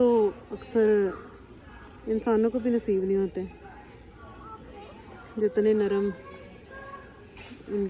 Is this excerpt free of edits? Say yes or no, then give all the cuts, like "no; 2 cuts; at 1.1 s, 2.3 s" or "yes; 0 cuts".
yes; 0 cuts